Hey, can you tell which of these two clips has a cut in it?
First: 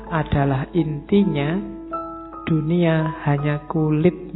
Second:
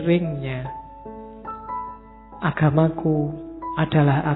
first; 1 cut; at 0.9 s

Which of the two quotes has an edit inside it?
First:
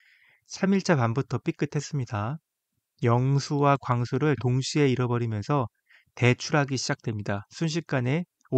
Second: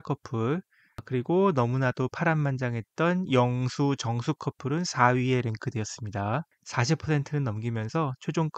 second; 2 cuts; at 1.0 s, 6.6 s

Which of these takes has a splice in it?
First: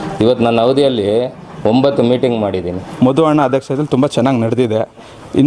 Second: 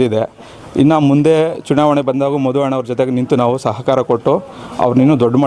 first; 1 cut; at 2.8 s

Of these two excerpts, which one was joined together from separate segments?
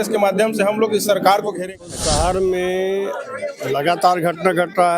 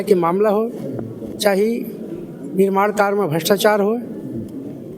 first; 1 cut; at 2.0 s

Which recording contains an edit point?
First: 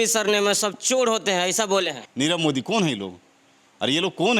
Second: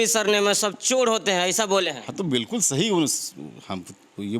first; 1 cut; at 2.0 s

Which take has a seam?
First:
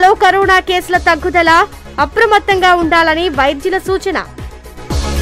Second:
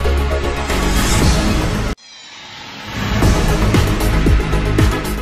second; 2 cuts; at 1.7 s, 4.4 s

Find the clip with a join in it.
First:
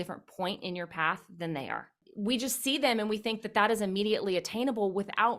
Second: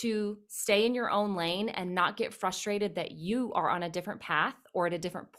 first; 1 cut; at 2.0 s

